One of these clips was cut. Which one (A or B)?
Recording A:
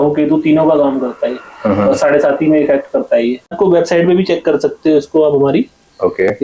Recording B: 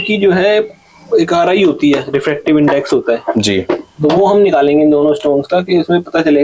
A